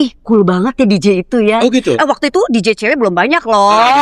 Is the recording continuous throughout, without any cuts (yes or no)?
yes